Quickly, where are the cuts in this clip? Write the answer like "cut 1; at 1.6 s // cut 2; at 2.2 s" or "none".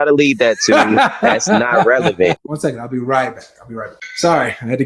cut 1; at 2.5 s // cut 2; at 4.0 s